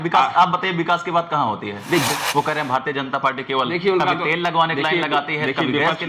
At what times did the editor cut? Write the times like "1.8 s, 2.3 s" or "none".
2.1 s